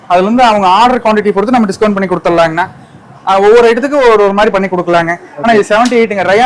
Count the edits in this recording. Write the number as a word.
zero